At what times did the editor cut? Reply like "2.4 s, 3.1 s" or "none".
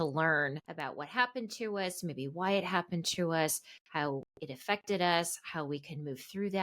none